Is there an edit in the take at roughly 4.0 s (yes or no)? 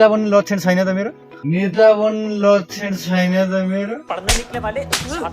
yes